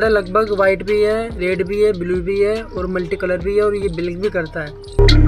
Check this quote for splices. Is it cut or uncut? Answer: uncut